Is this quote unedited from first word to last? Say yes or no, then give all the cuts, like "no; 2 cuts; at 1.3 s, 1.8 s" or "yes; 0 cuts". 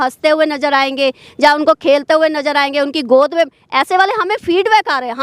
yes; 0 cuts